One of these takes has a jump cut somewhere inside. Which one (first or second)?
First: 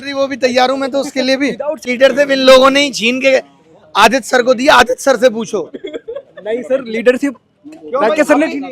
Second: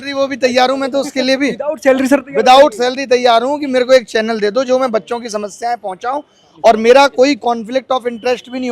first